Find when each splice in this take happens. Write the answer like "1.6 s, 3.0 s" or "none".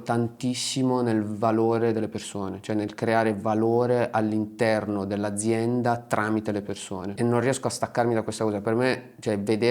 7.0 s